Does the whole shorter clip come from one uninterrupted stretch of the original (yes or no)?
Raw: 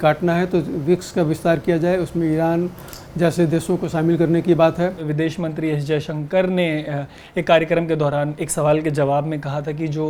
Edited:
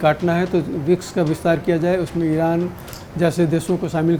yes